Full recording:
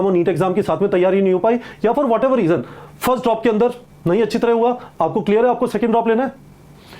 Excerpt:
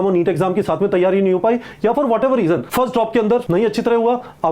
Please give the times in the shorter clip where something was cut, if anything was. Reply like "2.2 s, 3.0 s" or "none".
2.7 s, 3.5 s